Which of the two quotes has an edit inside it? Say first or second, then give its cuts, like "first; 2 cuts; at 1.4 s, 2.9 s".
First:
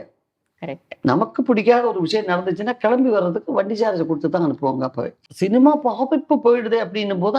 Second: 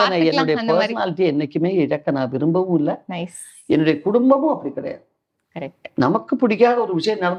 first; 1 cut; at 5.1 s